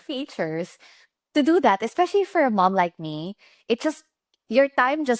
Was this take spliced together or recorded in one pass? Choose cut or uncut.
uncut